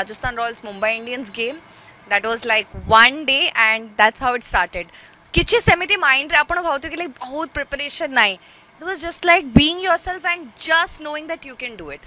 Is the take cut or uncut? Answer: uncut